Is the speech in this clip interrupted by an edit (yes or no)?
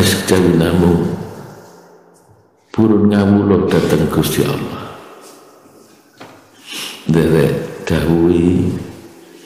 no